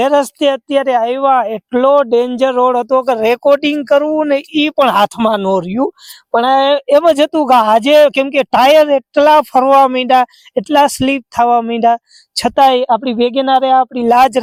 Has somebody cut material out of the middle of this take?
no; 0 cuts

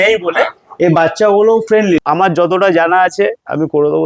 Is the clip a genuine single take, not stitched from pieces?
no; 1 cut; at 2.0 s

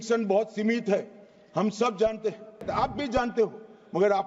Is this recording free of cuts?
no; 1 cut; at 2.6 s

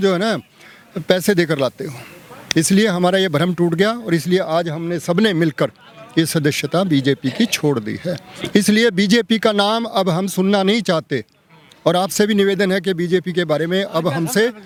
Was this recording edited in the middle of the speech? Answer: no; 0 cuts

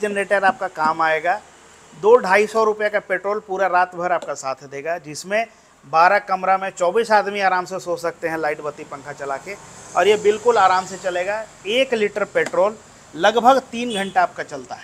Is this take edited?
no; 0 cuts

